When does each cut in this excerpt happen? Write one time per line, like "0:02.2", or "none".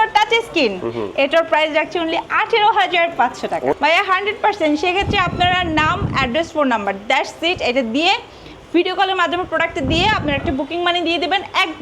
0:03.7